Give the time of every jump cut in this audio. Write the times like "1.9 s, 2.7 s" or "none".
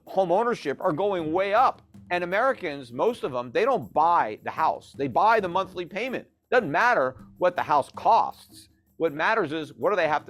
1.9 s